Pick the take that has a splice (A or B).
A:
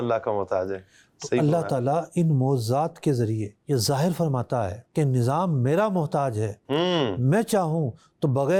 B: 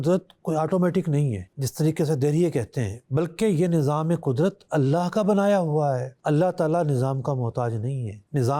B